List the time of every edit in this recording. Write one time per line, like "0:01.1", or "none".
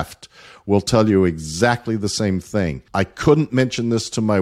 0:02.8

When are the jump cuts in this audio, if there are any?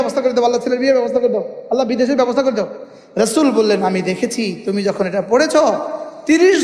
0:02.7

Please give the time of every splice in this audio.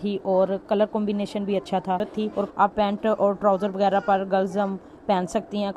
0:02.5

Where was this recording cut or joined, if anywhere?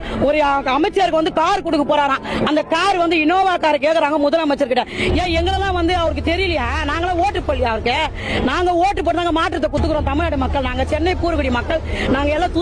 none

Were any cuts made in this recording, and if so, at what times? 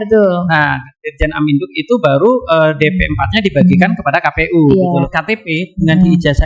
0:05.1

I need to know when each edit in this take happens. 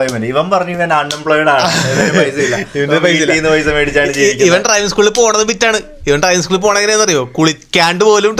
none

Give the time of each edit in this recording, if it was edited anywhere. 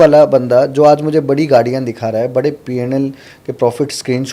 none

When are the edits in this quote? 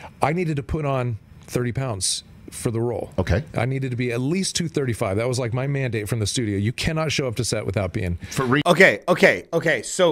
none

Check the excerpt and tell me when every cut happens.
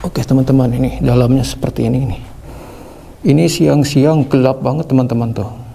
none

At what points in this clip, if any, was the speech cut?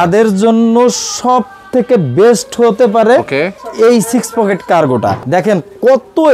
0:03.6
0:05.2

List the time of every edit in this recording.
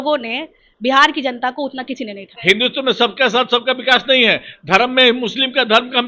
0:02.3

